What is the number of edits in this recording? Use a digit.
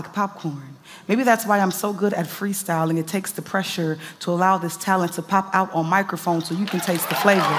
0